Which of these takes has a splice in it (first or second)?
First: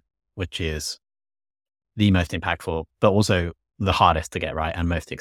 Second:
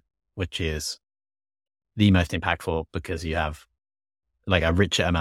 first